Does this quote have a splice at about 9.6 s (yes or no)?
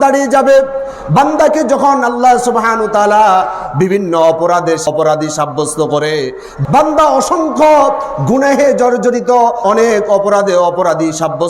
yes